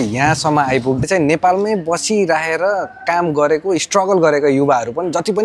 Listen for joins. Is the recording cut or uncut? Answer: cut